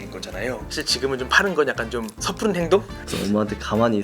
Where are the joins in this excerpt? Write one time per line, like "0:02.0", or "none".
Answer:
0:02.2
0:03.0